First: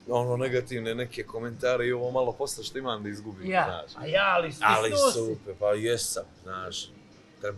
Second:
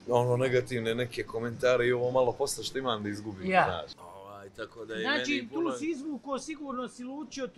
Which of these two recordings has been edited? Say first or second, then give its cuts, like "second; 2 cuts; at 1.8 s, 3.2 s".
second; 1 cut; at 3.9 s